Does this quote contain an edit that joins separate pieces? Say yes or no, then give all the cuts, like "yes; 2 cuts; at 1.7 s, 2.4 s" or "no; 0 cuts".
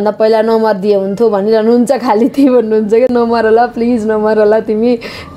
no; 0 cuts